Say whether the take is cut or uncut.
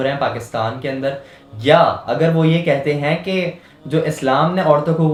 uncut